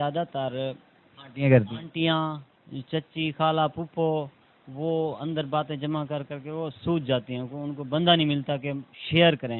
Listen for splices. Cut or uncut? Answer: uncut